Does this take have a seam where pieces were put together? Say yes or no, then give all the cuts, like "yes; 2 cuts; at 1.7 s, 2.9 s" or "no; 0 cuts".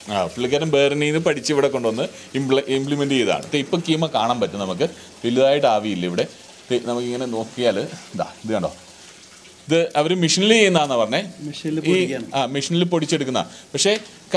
no; 0 cuts